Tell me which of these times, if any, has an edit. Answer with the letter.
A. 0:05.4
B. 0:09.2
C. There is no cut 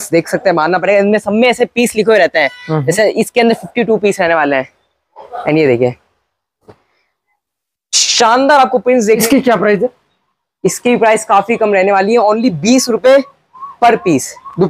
B